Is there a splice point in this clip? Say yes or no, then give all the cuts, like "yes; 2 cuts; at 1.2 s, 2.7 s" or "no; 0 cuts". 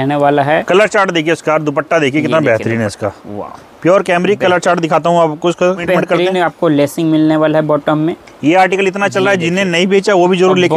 yes; 1 cut; at 5.8 s